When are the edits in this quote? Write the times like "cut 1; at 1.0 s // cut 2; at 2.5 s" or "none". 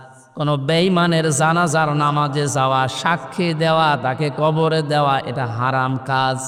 none